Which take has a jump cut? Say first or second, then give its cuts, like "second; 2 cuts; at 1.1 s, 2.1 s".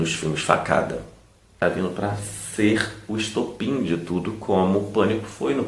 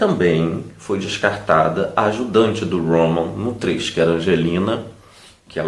first; 1 cut; at 1.6 s